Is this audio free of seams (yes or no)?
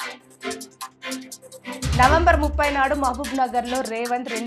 yes